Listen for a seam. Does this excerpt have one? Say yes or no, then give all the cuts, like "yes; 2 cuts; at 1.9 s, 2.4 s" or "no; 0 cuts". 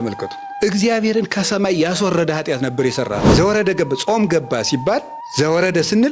yes; 1 cut; at 3.3 s